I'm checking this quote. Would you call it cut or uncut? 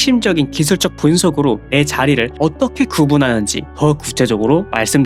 uncut